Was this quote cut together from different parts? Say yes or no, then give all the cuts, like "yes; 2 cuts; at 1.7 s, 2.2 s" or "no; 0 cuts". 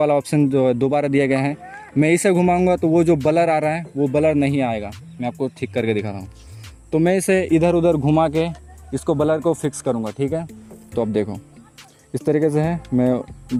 no; 0 cuts